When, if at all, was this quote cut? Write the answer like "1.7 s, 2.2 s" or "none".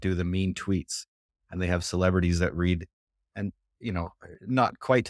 none